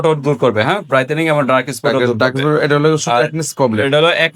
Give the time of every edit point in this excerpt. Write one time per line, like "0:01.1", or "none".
none